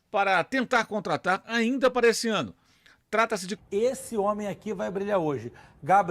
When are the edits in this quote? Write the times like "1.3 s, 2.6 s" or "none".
3.5 s